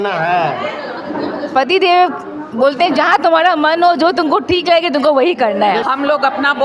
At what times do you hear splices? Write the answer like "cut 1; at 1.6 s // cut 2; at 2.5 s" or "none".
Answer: none